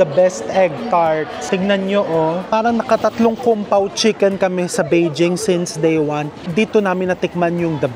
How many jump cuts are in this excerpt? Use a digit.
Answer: 3